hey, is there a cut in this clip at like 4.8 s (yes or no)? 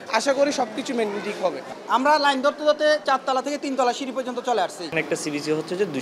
yes